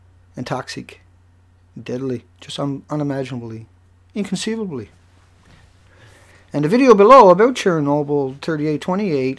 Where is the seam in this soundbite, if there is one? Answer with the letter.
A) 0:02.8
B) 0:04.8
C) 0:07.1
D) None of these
A